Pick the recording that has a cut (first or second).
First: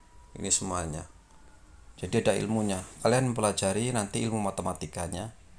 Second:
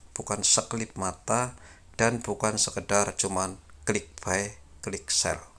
first